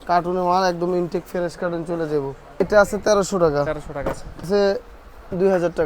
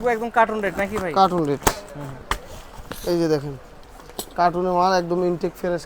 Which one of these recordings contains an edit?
first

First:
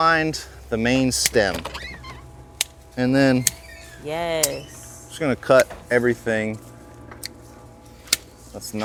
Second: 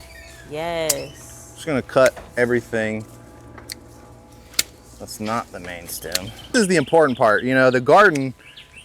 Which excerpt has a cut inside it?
second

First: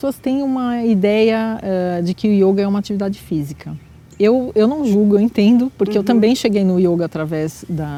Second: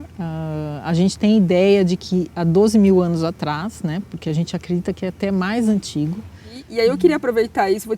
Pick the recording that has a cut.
second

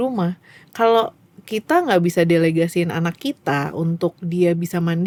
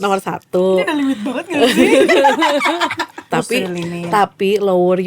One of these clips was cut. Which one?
second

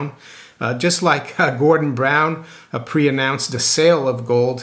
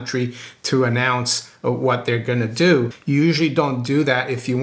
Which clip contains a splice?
second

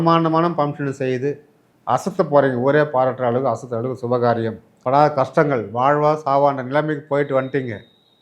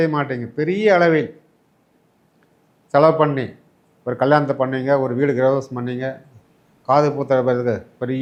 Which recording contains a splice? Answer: first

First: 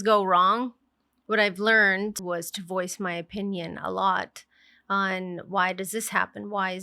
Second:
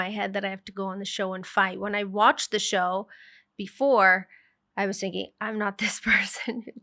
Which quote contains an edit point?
first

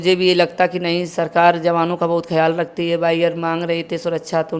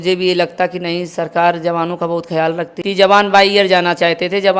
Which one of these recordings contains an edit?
second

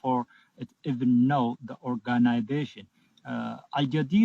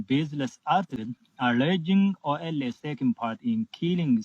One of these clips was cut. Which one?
second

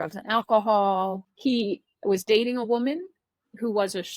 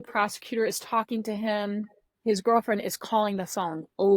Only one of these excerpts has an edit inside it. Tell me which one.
first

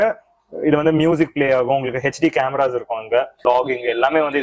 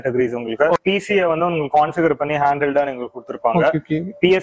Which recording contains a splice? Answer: first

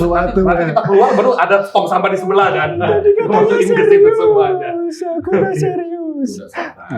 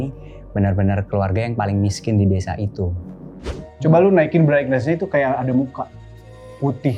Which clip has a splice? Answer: second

